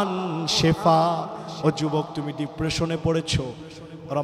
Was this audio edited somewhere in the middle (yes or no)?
no